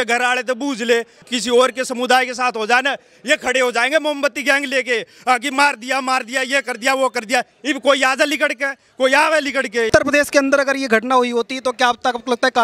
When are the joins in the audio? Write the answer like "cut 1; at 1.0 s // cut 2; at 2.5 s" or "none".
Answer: cut 1; at 1.2 s // cut 2; at 9.9 s